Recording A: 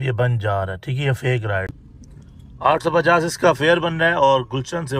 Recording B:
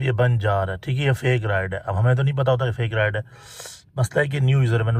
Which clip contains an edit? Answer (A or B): A